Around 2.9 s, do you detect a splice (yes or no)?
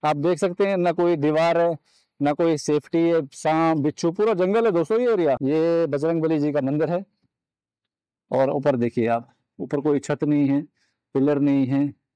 no